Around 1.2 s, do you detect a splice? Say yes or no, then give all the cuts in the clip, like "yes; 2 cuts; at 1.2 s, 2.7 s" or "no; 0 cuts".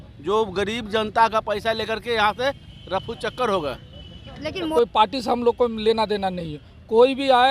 no; 1 cut; at 4.7 s